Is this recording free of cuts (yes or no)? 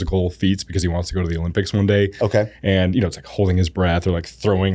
yes